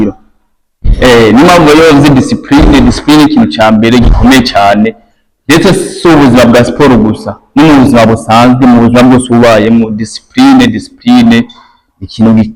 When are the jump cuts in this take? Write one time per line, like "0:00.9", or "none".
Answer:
none

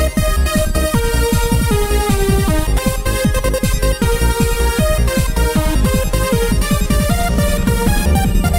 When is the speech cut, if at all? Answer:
0:06.4

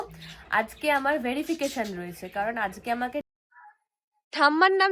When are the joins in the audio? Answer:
0:03.2

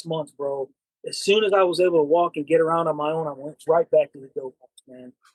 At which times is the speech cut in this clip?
none

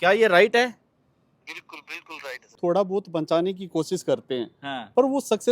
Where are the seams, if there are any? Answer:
0:02.5

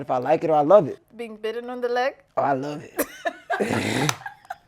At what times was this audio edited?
0:01.0

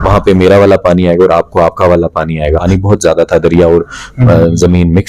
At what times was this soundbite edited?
0:02.7

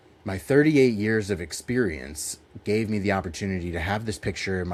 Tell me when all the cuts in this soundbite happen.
none

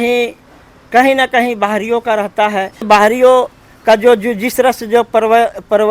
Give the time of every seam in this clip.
0:02.9

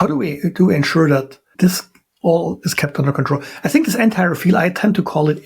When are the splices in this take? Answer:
0:01.4

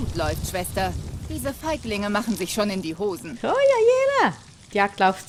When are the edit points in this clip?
none

